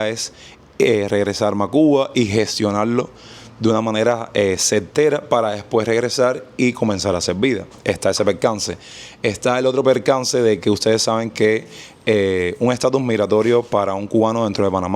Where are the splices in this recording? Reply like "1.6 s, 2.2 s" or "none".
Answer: none